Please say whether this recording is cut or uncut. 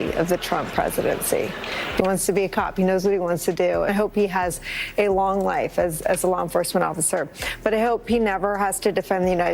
uncut